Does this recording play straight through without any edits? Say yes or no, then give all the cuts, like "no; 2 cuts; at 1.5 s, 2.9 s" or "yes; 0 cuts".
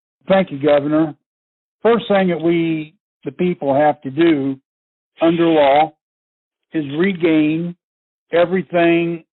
yes; 0 cuts